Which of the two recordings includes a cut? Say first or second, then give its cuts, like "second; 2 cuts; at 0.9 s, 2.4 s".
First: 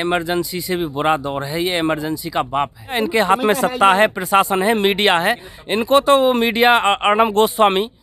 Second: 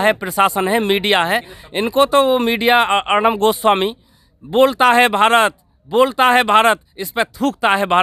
first; 1 cut; at 3.0 s